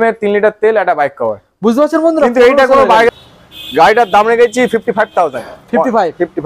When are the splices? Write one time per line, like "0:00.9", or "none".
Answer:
0:03.1